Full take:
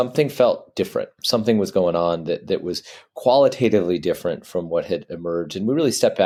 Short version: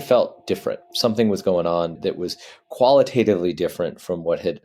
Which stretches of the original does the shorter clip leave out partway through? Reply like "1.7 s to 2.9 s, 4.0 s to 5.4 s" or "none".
2.3 s to 2.4 s